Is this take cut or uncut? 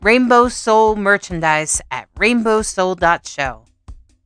uncut